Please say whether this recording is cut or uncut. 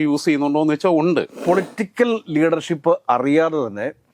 cut